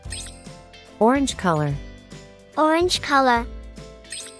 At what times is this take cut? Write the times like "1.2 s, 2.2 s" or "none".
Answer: 1.0 s